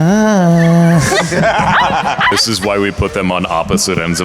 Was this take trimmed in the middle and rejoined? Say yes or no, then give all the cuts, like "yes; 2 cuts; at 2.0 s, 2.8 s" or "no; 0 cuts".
yes; 1 cut; at 2.3 s